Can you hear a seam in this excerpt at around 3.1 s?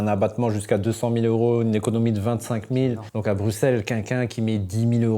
yes; 1 cut; at 3.1 s

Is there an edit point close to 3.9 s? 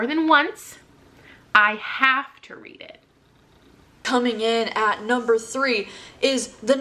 yes; 1 cut; at 3.9 s

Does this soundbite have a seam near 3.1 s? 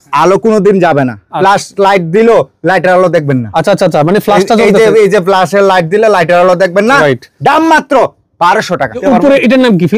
no; 2 cuts; at 1.3 s, 9.0 s

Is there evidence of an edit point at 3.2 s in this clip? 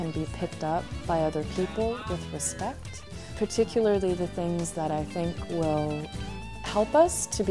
yes; 1 cut; at 3.2 s

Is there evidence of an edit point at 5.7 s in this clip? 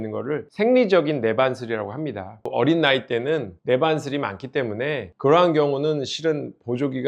no; 1 cut; at 2.5 s

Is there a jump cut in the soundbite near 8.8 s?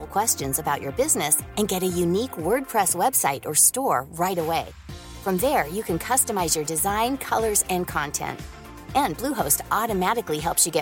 no; 0 cuts

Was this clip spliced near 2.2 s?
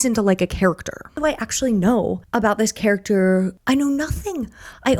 yes; 3 cuts; at 1.1 s, 2.2 s, 3.6 s

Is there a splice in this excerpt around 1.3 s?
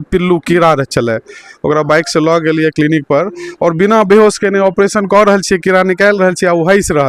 no; 0 cuts

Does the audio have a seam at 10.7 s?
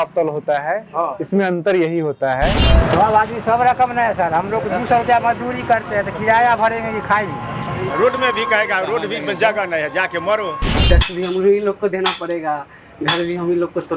yes; 3 cuts; at 2.6 s, 7.9 s, 10.7 s

